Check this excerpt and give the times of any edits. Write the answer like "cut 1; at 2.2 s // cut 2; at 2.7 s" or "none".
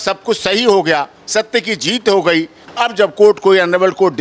cut 1; at 2.6 s